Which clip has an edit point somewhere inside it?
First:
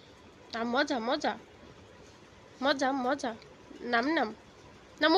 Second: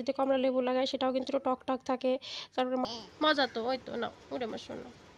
second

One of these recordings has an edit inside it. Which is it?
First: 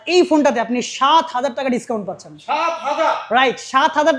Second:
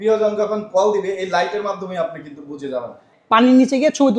second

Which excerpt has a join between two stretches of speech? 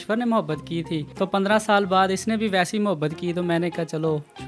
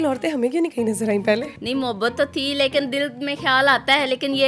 second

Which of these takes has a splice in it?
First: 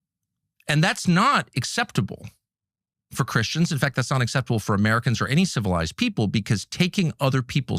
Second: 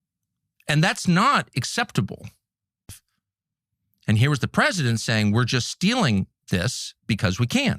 second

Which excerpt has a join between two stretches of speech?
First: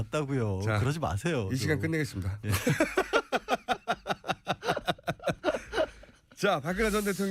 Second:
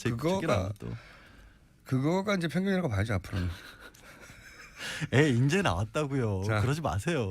second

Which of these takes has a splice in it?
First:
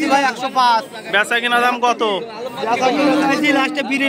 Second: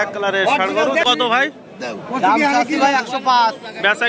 second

